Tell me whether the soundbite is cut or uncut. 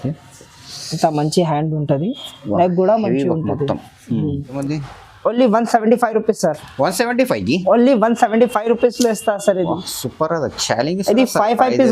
cut